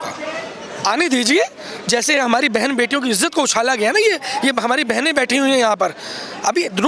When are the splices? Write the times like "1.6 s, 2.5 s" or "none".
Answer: none